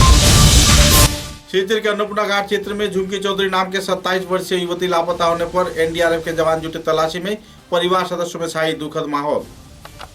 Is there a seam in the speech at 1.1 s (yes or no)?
no